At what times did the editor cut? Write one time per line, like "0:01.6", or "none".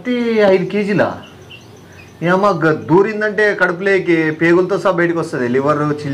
0:01.1